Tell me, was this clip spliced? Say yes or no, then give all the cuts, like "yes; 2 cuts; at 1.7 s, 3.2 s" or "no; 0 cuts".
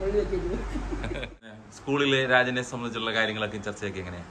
yes; 1 cut; at 1.5 s